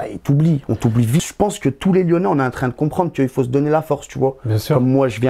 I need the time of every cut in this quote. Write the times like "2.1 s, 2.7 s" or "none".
1.2 s